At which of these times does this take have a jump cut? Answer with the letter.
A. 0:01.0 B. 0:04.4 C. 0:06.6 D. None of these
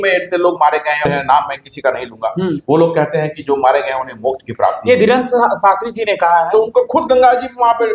A